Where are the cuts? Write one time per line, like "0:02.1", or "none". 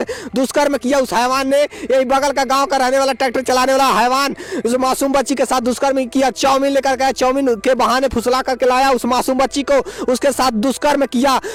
none